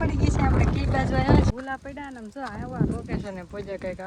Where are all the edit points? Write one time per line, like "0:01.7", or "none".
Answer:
0:01.5